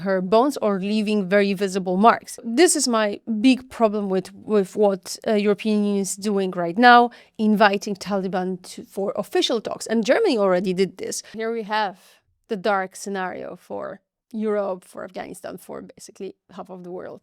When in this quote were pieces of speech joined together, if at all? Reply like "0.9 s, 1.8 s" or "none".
2.3 s, 11.3 s